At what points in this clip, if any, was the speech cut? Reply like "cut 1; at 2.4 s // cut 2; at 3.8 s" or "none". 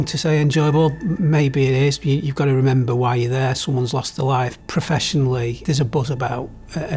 cut 1; at 1.2 s // cut 2; at 4.6 s // cut 3; at 5.6 s

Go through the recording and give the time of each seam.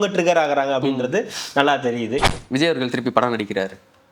cut 1; at 2.3 s

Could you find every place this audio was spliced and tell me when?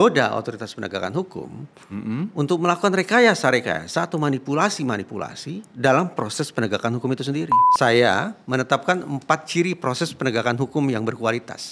cut 1; at 7.6 s

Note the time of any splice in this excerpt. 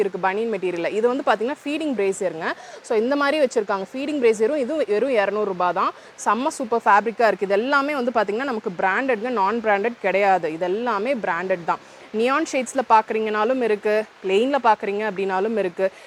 none

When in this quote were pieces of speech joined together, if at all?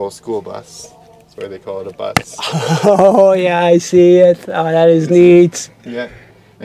none

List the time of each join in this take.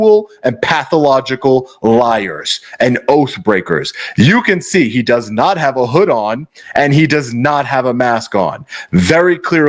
none

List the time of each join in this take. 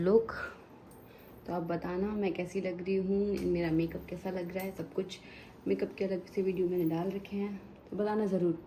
none

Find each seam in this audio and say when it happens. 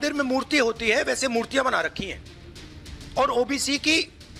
none

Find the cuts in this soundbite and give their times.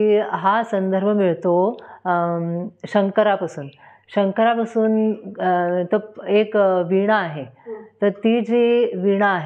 none

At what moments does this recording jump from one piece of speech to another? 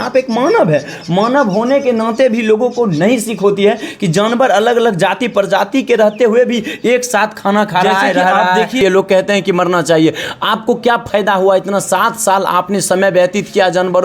cut 1; at 8.8 s

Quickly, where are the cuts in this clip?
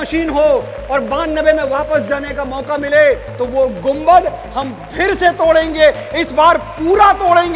none

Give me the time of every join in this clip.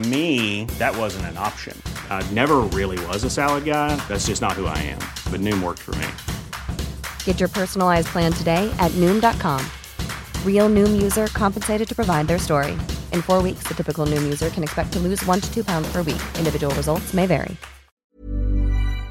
cut 1; at 18.1 s

